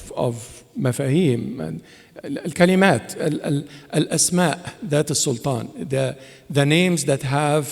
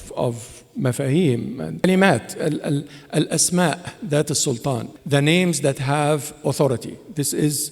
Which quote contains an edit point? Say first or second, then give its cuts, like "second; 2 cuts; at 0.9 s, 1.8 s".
second; 2 cuts; at 1.8 s, 4.9 s